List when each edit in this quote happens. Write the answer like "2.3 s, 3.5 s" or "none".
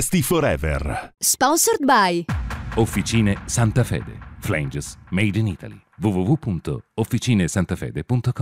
1.1 s